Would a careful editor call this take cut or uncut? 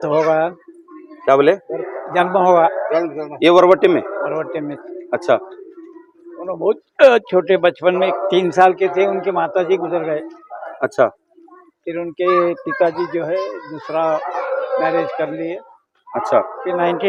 uncut